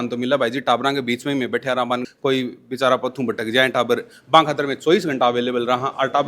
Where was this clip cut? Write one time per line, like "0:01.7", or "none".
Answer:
0:02.1